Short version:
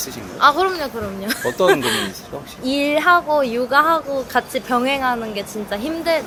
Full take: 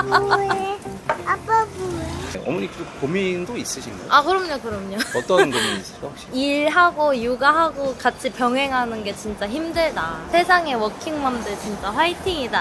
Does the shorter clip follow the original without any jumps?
yes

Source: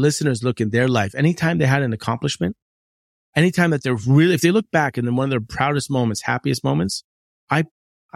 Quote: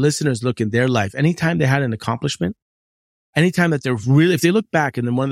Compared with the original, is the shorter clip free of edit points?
yes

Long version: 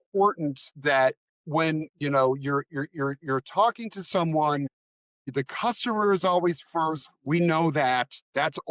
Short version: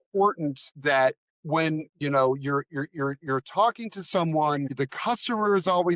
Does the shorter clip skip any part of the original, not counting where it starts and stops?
yes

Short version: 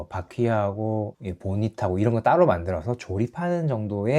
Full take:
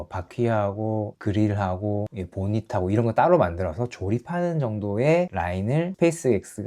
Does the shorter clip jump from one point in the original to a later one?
yes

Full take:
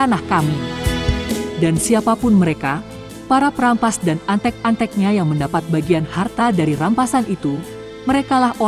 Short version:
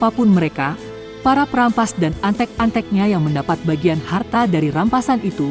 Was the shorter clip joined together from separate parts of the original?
no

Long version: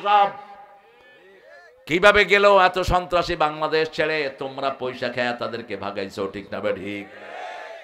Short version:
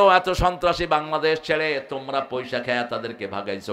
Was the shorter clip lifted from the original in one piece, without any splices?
yes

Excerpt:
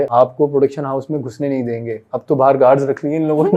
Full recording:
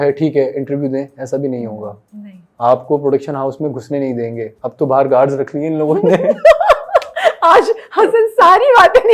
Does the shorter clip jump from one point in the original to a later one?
no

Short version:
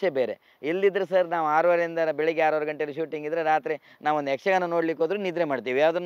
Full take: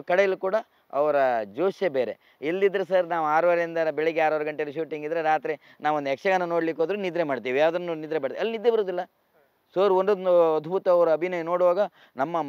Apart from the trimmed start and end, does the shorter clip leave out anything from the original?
no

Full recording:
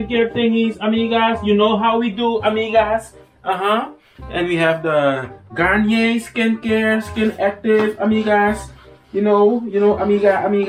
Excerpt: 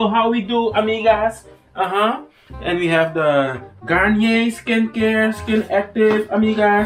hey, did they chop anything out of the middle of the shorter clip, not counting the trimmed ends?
no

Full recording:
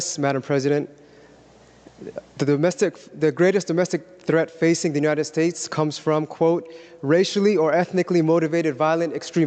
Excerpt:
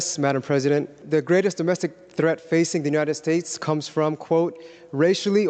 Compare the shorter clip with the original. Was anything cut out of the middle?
yes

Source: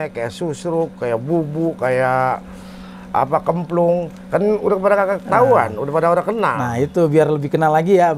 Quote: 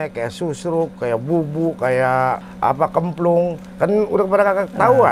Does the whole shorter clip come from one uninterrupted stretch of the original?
no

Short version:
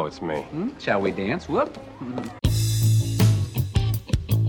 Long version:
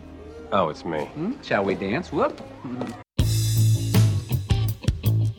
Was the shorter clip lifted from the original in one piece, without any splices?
no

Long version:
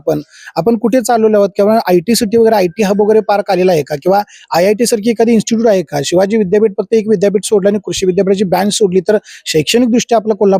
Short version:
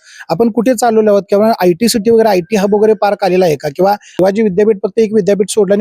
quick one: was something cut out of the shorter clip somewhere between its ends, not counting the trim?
yes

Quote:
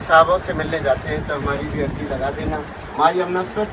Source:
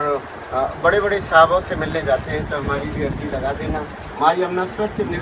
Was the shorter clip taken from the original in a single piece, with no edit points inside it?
yes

